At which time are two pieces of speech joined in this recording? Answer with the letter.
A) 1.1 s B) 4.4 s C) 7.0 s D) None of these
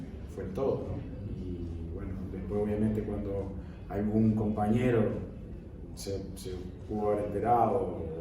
D